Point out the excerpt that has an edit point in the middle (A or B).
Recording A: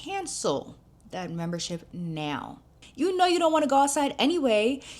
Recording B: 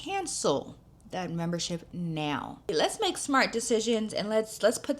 B